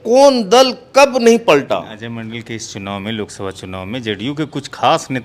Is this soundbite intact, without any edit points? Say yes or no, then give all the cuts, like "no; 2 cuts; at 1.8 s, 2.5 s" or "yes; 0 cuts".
no; 1 cut; at 1.9 s